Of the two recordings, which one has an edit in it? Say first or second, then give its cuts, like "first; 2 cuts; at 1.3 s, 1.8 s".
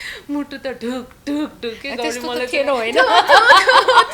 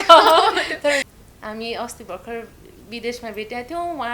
second; 1 cut; at 1.1 s